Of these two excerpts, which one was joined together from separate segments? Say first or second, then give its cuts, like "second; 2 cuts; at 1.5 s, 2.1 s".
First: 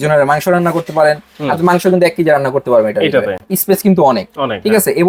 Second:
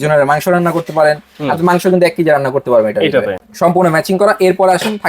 second; 1 cut; at 3.4 s